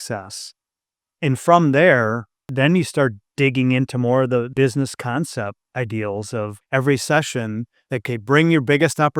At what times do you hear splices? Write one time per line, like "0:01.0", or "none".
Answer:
0:02.5
0:03.2
0:04.5
0:05.6
0:06.6
0:08.0

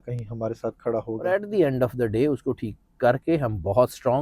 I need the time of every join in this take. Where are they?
0:01.3

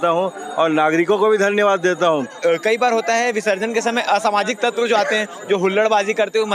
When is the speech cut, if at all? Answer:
0:02.4

